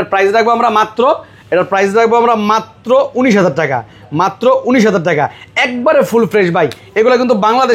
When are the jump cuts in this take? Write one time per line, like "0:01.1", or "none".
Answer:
none